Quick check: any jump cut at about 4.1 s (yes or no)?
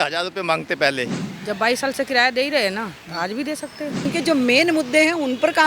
yes